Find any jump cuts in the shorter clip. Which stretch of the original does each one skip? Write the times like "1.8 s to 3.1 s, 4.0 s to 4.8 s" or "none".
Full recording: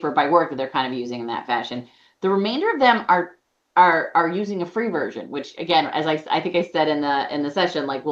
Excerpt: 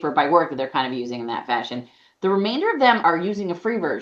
3.0 s to 4.1 s